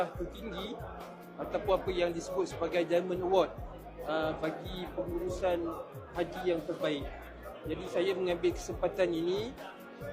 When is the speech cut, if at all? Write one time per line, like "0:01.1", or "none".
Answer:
none